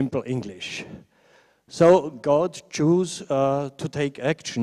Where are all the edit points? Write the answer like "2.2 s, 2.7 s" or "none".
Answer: 2.3 s